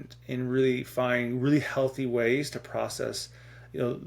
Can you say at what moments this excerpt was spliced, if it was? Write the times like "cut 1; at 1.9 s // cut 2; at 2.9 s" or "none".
none